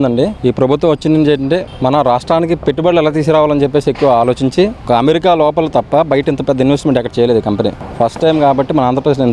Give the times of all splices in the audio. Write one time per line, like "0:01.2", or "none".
none